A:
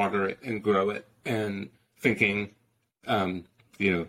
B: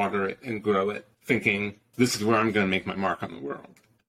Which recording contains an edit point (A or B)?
B